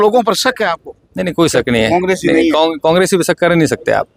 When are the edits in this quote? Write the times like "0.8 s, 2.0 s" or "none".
none